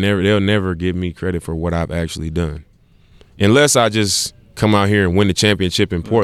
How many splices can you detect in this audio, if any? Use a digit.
0